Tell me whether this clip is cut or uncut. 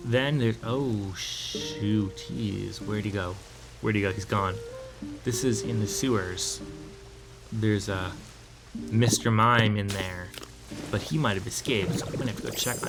uncut